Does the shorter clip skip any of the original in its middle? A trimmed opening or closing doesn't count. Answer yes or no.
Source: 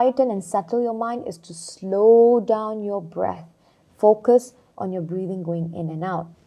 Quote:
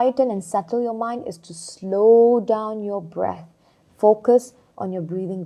no